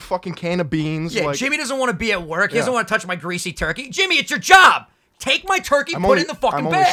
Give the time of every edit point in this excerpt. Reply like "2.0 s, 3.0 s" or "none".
none